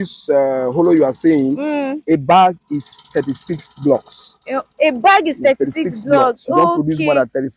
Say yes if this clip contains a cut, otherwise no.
no